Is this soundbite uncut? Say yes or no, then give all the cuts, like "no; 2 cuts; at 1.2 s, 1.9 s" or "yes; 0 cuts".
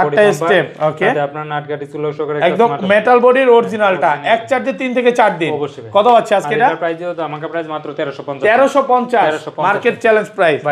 yes; 0 cuts